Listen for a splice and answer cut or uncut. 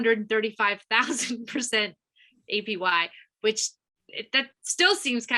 uncut